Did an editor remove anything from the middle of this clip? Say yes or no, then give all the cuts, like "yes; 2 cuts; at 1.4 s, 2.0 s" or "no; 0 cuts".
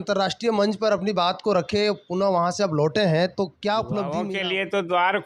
yes; 1 cut; at 4.1 s